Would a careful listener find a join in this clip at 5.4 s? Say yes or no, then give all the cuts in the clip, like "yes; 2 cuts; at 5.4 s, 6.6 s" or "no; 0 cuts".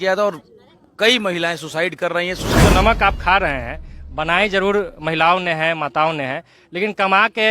no; 1 cut; at 2.6 s